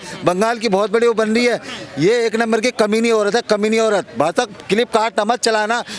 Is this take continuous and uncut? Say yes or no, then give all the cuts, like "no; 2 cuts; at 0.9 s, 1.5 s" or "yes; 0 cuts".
yes; 0 cuts